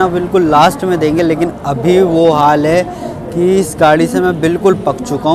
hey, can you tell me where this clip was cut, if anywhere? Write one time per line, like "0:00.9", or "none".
none